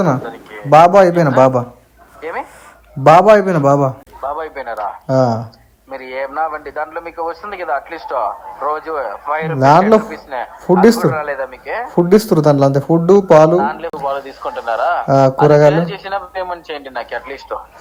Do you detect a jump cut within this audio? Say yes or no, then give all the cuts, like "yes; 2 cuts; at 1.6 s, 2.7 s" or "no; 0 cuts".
no; 0 cuts